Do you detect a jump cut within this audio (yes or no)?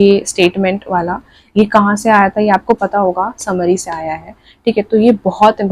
no